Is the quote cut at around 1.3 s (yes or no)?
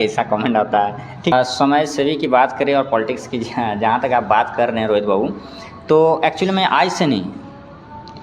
yes